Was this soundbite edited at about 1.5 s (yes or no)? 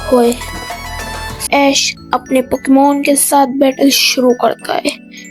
yes